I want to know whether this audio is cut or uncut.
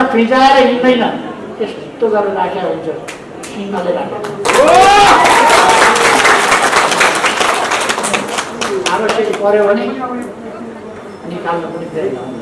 uncut